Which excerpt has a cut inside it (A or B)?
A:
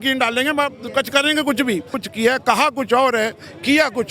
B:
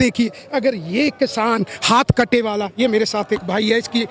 A